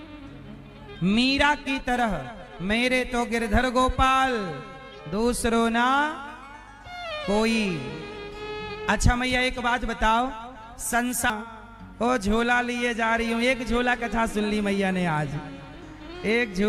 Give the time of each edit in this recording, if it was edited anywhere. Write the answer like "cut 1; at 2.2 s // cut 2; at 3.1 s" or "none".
cut 1; at 11.3 s